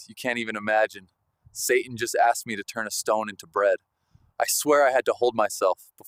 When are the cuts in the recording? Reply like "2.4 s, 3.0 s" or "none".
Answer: none

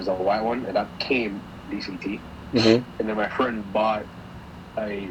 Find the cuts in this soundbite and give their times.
2.9 s

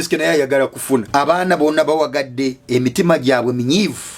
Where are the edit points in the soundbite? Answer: 1.1 s

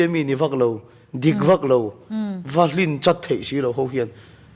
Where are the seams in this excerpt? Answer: none

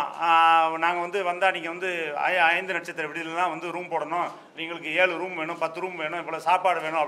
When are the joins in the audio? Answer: none

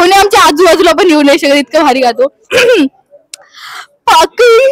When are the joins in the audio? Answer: 2.5 s

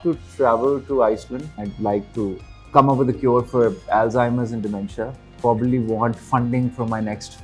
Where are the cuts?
1.6 s, 2.5 s, 5.2 s

